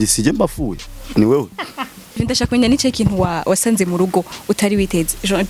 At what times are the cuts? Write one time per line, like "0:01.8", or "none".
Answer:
0:02.2